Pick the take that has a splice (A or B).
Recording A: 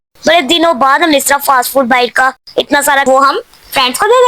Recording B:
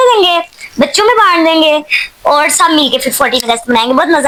A